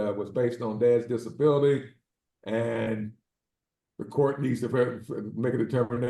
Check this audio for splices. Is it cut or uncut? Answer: uncut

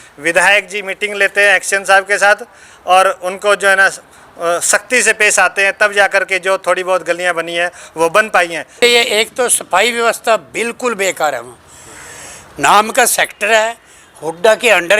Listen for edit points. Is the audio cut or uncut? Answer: cut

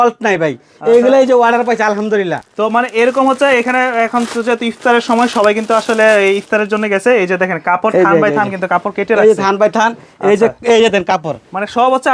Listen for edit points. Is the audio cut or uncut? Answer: uncut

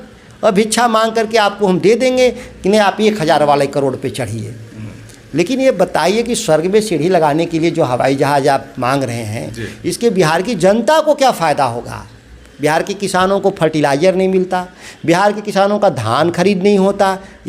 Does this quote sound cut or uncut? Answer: uncut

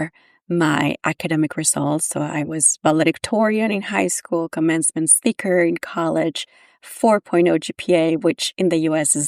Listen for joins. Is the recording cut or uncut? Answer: uncut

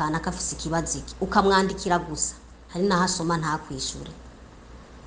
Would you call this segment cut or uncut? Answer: uncut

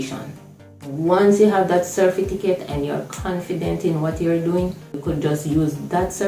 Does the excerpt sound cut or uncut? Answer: cut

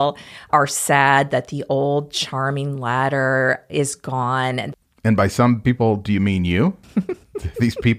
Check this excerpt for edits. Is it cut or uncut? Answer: uncut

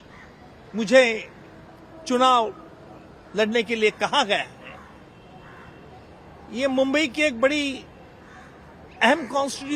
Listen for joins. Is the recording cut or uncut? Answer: uncut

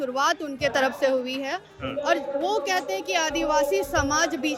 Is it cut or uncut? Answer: uncut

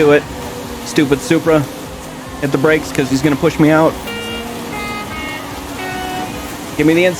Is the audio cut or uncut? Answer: cut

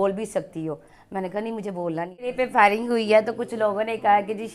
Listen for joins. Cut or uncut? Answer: cut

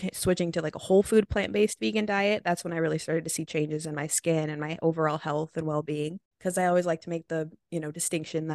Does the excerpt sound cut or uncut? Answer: cut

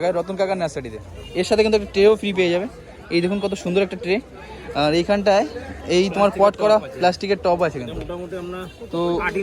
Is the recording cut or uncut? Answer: uncut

